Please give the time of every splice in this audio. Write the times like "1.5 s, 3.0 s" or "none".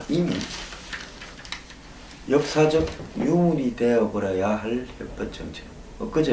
5.0 s